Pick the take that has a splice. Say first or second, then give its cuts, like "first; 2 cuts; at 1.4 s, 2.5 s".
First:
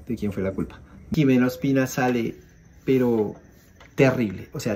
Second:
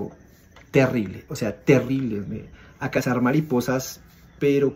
first; 1 cut; at 1.1 s